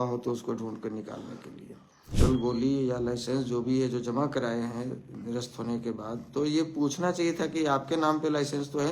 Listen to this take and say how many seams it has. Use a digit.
1